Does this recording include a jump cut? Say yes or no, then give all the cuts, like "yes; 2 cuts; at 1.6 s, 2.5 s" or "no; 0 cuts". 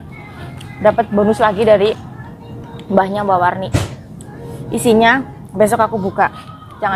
no; 0 cuts